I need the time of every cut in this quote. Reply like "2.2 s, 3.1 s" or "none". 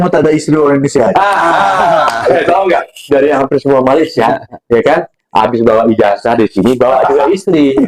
none